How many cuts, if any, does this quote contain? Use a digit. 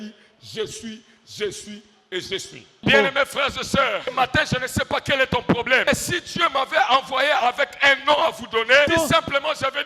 4